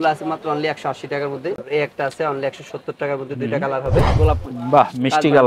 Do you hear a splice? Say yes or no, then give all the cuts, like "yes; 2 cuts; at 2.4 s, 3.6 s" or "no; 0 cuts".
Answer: yes; 2 cuts; at 1.6 s, 4.1 s